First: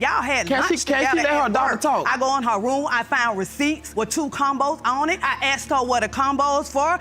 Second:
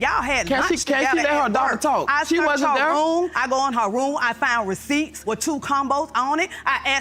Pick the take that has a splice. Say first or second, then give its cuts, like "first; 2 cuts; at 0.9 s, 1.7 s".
first; 2 cuts; at 2.1 s, 5.2 s